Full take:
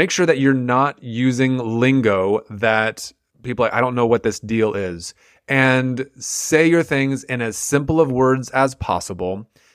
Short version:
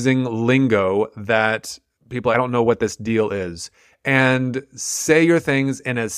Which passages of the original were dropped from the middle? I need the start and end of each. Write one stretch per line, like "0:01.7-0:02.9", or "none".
0:03.7-0:03.8